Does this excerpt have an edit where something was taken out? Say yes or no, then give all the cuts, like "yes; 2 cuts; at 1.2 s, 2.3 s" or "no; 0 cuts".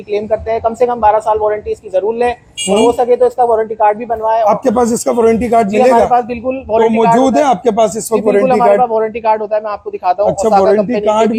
no; 0 cuts